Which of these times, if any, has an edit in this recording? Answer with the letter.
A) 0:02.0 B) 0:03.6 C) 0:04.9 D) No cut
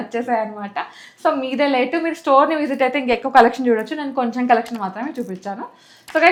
D